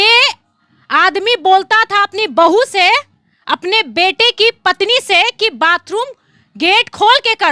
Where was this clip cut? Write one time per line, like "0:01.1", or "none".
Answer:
none